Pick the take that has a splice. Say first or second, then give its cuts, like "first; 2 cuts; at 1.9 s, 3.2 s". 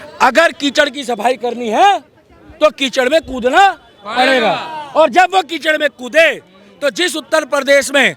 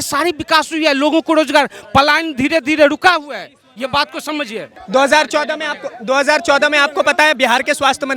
second; 1 cut; at 4.7 s